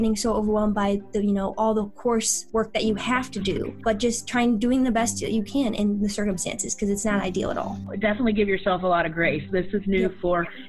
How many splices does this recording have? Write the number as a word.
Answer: three